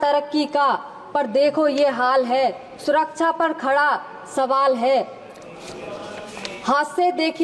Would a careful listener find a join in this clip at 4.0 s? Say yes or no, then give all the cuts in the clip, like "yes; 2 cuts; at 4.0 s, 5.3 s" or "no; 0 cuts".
no; 0 cuts